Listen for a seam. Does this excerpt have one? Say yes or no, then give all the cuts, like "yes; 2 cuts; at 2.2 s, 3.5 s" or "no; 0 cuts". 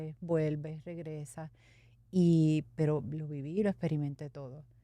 no; 0 cuts